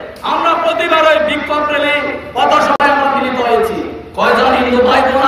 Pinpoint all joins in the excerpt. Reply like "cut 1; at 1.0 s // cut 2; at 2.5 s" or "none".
none